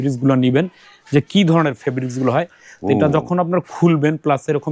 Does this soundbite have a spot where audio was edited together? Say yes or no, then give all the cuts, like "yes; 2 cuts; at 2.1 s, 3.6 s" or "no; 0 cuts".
no; 0 cuts